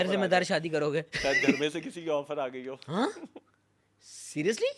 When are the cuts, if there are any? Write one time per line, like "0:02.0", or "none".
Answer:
none